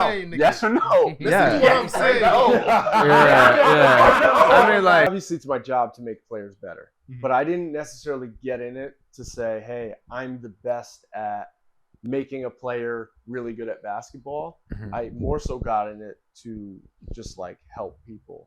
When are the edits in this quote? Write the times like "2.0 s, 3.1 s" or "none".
5.1 s

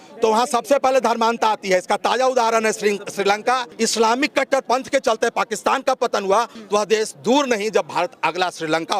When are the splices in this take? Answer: 3.7 s, 6.6 s

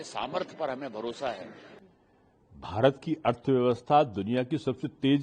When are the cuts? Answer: 1.6 s

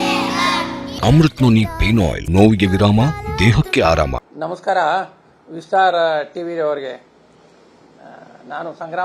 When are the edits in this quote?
0.9 s, 2.2 s, 4.2 s

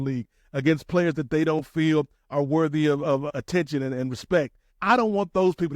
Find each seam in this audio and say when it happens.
3.2 s, 4.7 s

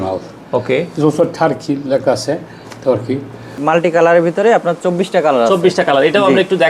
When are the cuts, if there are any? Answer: 3.5 s

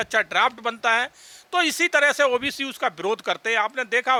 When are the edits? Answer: none

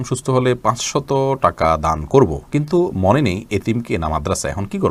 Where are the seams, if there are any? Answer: none

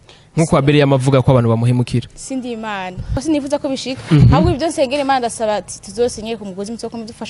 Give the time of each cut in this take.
3.1 s

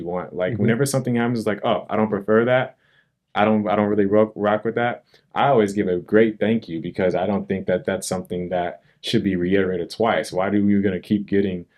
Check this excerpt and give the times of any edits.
none

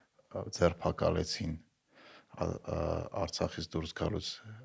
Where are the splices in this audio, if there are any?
none

